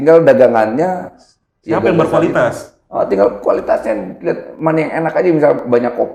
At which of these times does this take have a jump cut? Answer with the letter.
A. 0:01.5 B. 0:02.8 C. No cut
C